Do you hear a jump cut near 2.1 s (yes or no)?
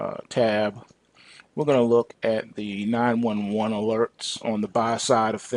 yes